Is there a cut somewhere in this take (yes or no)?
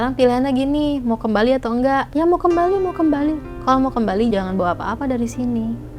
yes